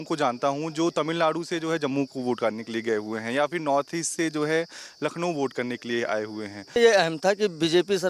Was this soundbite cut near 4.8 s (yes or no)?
no